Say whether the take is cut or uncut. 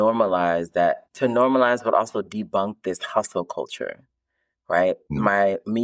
cut